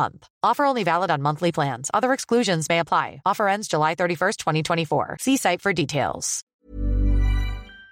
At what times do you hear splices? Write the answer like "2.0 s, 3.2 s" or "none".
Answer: 6.5 s